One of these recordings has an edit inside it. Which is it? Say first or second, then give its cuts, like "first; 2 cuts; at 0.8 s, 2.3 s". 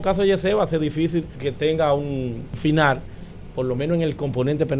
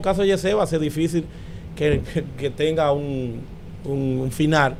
first; 2 cuts; at 1.3 s, 2.6 s